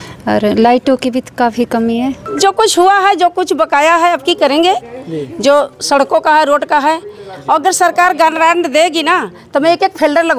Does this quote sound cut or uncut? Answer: cut